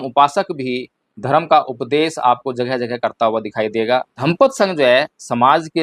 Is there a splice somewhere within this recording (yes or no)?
yes